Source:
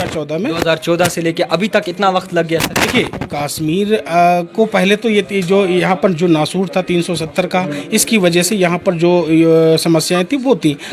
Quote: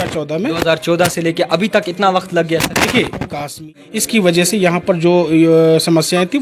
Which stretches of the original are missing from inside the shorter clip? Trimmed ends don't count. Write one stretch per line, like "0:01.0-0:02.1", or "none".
0:03.7-0:07.6

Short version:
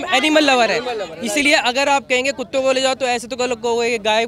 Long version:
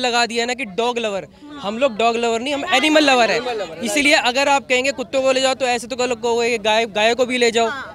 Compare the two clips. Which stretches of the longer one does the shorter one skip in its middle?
none

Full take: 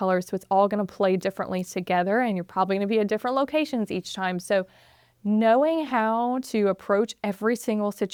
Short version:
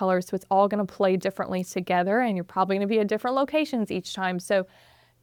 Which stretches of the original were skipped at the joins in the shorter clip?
none

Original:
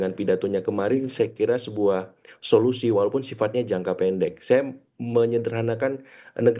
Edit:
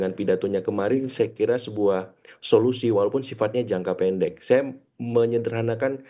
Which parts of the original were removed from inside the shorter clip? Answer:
none

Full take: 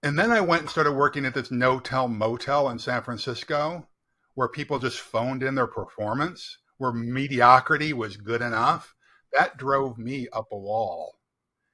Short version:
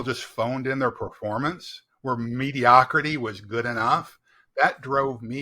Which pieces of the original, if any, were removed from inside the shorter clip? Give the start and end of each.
none

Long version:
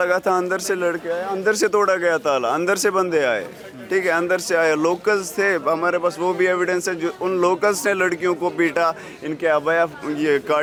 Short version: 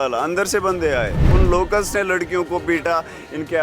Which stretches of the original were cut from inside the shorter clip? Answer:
0:03.6-0:07.2

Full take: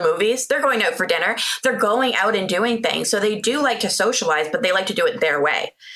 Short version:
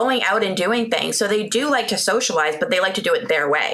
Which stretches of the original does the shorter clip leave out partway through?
none

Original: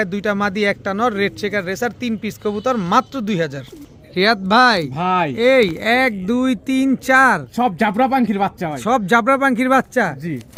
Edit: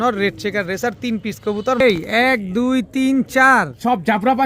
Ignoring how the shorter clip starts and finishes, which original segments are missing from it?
0:02.8-0:05.5

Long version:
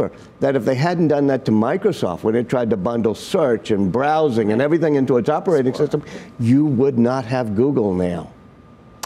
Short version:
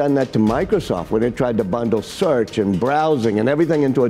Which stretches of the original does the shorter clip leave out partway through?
none

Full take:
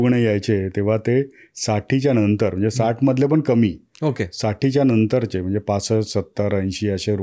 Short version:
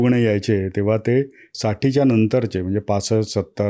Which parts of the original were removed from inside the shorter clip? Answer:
0:01.5-0:04.3

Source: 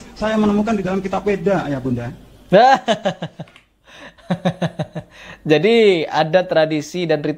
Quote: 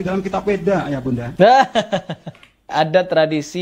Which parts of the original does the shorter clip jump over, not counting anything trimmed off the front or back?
0:02.1-0:02.4
0:03.8-0:06.1

